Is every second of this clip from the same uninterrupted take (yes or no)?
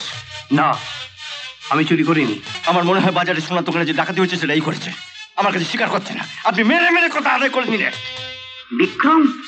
no